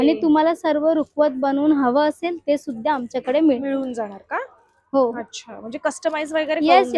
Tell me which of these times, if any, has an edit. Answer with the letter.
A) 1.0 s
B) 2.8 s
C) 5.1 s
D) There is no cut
D